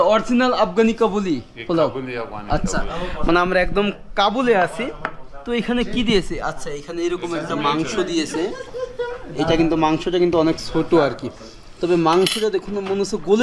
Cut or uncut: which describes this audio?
uncut